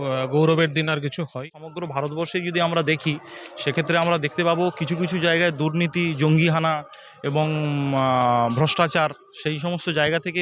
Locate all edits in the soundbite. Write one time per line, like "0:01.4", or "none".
0:01.4